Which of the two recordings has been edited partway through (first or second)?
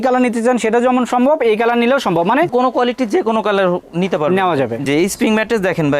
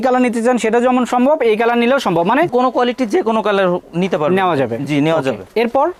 first